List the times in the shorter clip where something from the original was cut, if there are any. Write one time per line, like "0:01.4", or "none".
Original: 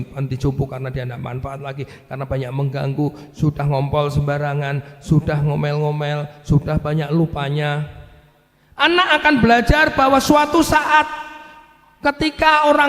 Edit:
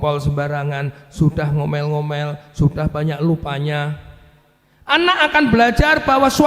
none